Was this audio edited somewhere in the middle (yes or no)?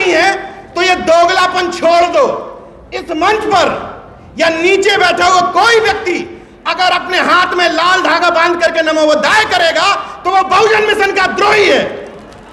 no